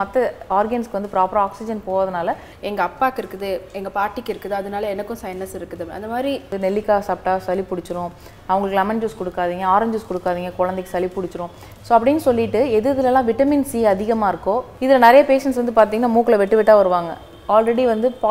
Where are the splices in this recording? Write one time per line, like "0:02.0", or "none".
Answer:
0:02.5
0:06.5
0:14.7